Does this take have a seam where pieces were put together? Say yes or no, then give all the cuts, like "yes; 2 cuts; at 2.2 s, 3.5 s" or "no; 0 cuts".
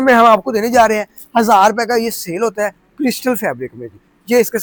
no; 0 cuts